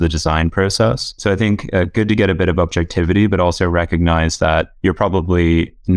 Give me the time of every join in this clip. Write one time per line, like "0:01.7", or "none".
0:01.1
0:04.7